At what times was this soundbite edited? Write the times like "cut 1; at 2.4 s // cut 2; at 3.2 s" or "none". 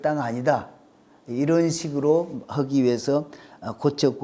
none

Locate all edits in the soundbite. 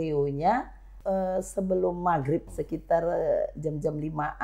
cut 1; at 0.9 s // cut 2; at 2.4 s

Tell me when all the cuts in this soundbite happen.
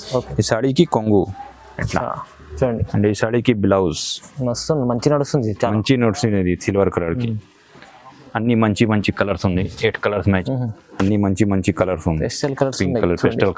cut 1; at 10.4 s

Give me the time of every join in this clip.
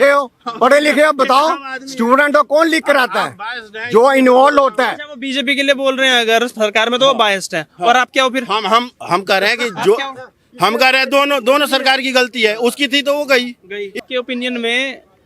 cut 1; at 13.9 s

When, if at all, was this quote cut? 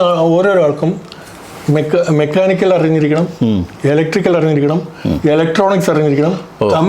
none

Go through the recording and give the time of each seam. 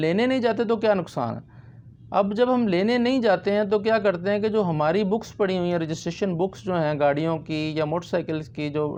none

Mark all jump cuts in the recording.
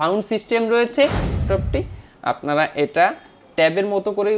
cut 1; at 1.4 s

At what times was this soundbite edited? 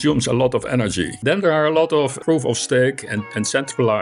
cut 1; at 1.1 s

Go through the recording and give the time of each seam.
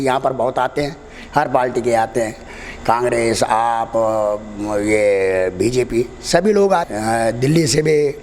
cut 1; at 6.9 s

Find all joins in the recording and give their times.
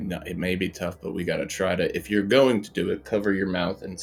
none

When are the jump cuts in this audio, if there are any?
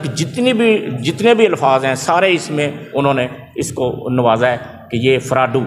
none

